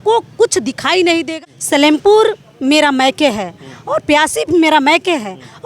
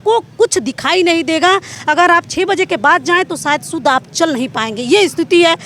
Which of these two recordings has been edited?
first; 1 cut; at 1.3 s

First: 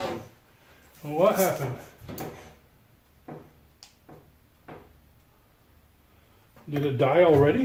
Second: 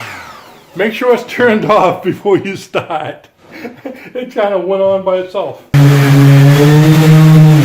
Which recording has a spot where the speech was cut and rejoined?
second; 1 cut; at 5.7 s

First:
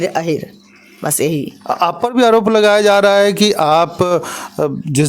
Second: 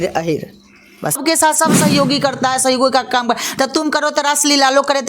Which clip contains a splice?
second; 1 cut; at 1.2 s

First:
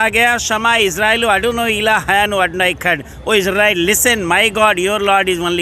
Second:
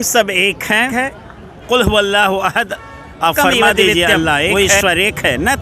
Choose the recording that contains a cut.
second; 2 cuts; at 0.9 s, 4.5 s

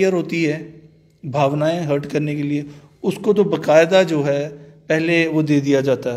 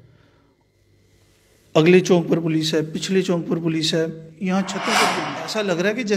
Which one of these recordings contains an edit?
second; 1 cut; at 4.8 s

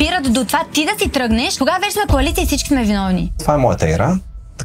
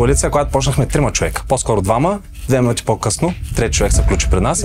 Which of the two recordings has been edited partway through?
first; 2 cuts; at 1.5 s, 3.4 s

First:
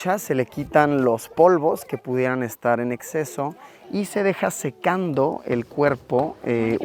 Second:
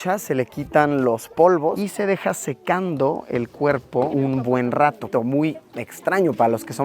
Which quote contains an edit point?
second; 3 cuts; at 1.8 s, 4.1 s, 5.0 s

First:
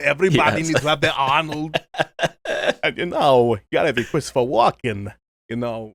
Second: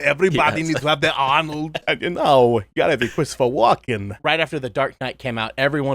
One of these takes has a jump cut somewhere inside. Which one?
second; 2 cuts; at 1.8 s, 4.1 s

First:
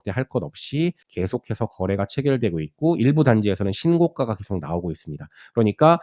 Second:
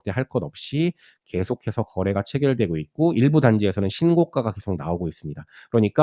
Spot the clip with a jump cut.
first; 1 cut; at 1.0 s

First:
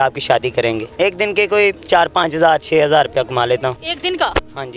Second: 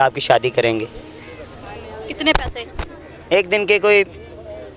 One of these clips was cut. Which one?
first; 3 cuts; at 0.9 s, 1.8 s, 3.9 s

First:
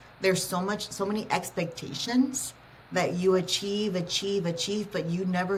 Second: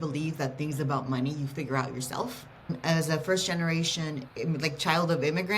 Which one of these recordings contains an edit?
second; 2 cuts; at 2.8 s, 4.3 s

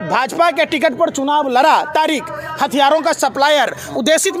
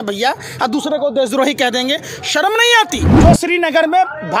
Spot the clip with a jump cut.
second; 1 cut; at 3.1 s

